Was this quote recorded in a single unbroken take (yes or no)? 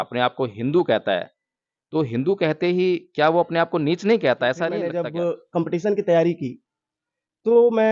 no